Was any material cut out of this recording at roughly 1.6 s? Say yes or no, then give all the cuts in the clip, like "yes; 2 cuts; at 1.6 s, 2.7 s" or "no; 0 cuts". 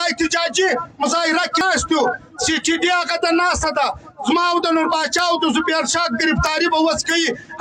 yes; 1 cut; at 1.6 s